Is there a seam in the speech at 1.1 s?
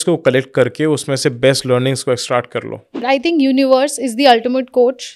no; 1 cut; at 3.0 s

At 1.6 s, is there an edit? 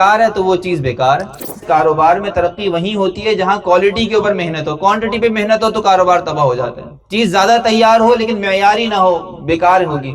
yes; 1 cut; at 1.6 s

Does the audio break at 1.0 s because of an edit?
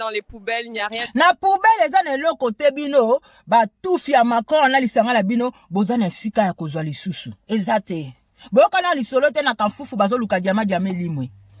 yes; 1 cut; at 1.0 s

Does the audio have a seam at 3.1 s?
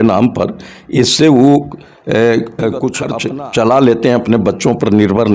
yes; 1 cut; at 3.1 s

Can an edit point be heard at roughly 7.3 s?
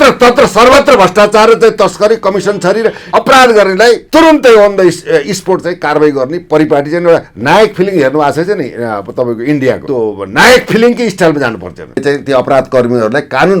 no; 4 cuts; at 3.0 s, 4.0 s, 9.8 s, 12.0 s

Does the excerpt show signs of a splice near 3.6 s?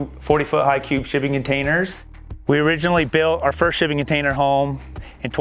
no; 1 cut; at 2.2 s

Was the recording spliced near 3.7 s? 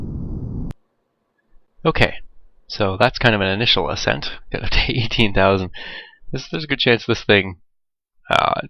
yes; 1 cut; at 3.7 s

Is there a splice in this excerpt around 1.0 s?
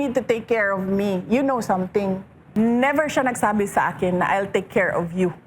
no; 1 cut; at 2.4 s

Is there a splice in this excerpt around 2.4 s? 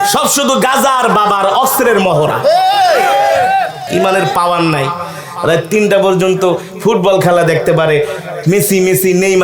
no; 1 cut; at 3.8 s

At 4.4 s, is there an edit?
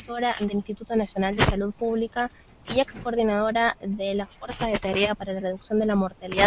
no; 1 cut; at 1.5 s

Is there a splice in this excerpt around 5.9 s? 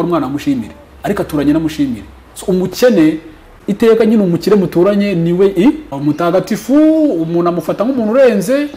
yes; 2 cuts; at 3.5 s, 5.9 s

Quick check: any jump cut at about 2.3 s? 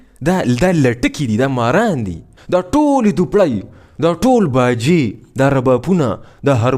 yes; 1 cut; at 2.3 s

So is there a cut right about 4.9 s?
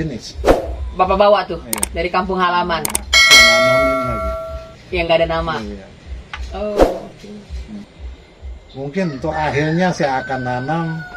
no; 1 cut; at 8.0 s

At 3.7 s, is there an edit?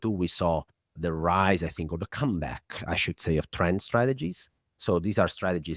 no; 1 cut; at 0.9 s

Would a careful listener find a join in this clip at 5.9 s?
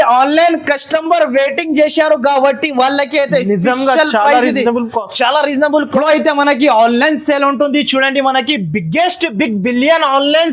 yes; 1 cut; at 5.9 s

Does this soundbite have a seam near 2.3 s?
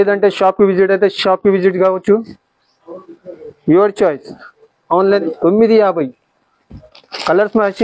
no; 1 cut; at 5.2 s

